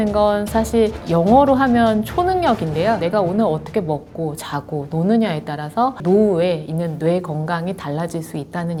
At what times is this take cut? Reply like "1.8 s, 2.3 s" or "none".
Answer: none